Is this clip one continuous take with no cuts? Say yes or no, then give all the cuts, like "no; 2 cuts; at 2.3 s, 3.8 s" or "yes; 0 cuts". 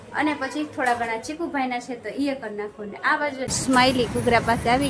no; 1 cut; at 3.5 s